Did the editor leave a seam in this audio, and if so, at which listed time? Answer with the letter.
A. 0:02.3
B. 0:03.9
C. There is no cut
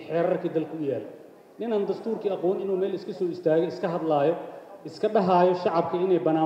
C